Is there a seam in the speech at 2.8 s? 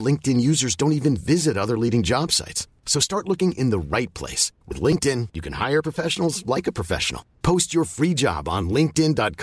no; 0 cuts

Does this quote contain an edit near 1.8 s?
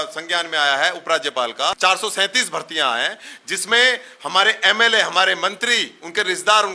yes; 1 cut; at 1.8 s

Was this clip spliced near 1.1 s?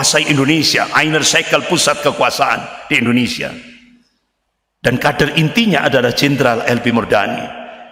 no; 0 cuts

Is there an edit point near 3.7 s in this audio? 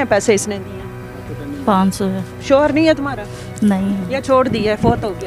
no; 1 cut; at 2.3 s

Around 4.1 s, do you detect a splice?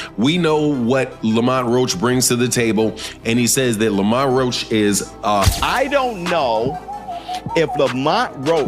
no; 1 cut; at 5.4 s

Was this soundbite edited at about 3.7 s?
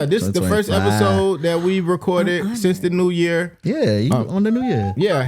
no; 0 cuts

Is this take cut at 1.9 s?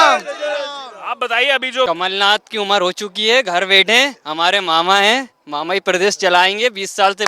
yes; 1 cut; at 1.9 s

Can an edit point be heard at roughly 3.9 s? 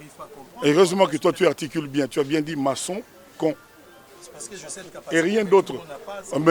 no; 0 cuts

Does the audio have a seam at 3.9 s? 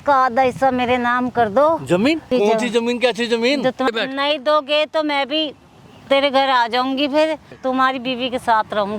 yes; 3 cuts; at 2.3 s, 3.9 s, 7.5 s

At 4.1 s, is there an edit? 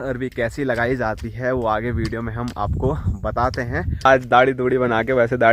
yes; 1 cut; at 4.1 s

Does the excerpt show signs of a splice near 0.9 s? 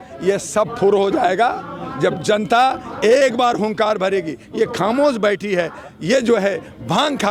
no; 0 cuts

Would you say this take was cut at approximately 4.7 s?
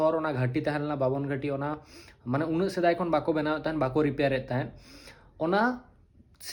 no; 0 cuts

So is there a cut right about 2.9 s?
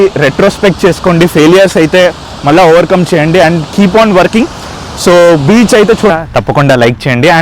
no; 1 cut; at 6.1 s

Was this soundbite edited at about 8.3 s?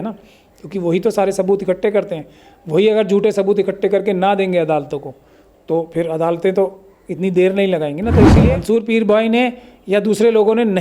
yes; 1 cut; at 8.3 s

